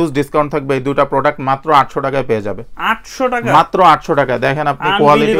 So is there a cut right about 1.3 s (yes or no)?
no